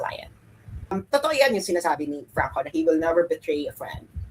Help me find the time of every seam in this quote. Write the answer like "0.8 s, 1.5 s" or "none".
0.9 s